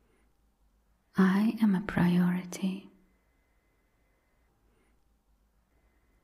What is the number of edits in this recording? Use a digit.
1